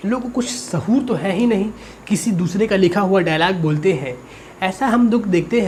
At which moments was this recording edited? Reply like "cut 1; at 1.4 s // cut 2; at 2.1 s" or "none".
none